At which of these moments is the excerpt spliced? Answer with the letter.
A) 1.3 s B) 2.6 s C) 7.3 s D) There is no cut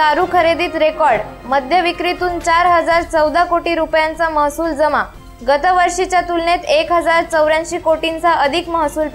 D